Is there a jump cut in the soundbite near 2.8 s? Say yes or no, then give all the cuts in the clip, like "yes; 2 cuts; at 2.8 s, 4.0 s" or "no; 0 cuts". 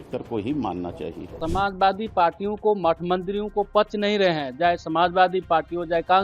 no; 1 cut; at 1.3 s